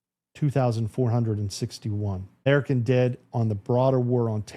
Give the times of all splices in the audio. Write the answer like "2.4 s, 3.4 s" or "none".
2.5 s